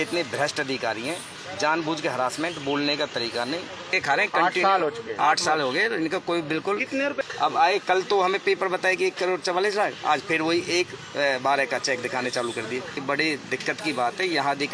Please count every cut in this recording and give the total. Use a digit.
3